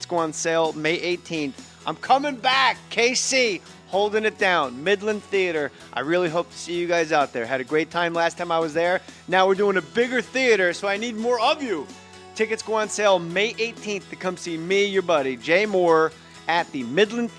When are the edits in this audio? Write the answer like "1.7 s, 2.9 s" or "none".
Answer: none